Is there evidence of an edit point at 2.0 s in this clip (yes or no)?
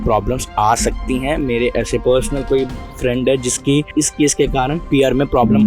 yes